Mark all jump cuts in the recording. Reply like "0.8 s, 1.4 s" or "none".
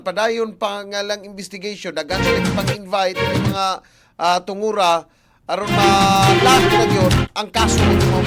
none